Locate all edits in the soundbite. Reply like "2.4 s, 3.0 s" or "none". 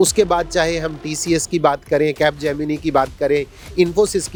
none